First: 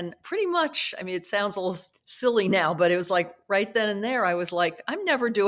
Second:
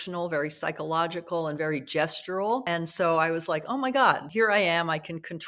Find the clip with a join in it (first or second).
second